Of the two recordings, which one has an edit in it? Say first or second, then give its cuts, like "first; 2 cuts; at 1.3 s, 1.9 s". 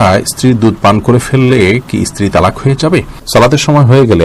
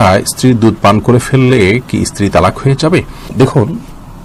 first; 1 cut; at 3.2 s